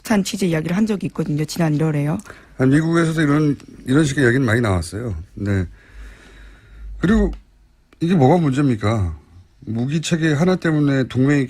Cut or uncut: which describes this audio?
cut